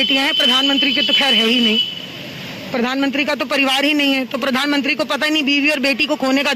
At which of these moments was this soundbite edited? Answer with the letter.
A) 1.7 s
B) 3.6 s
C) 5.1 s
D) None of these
D